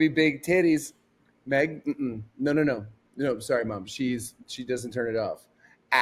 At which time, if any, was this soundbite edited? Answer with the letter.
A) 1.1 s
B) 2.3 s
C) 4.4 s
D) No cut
D